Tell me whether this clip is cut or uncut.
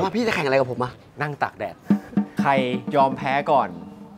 cut